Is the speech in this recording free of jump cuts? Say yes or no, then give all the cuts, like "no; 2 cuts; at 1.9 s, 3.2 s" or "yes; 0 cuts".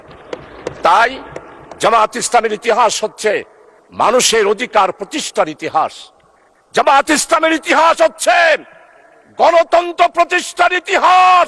yes; 0 cuts